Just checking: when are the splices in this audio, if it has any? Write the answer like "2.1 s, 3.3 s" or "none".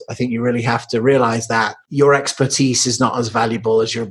1.8 s